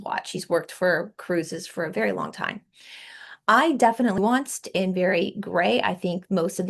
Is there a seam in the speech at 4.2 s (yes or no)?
yes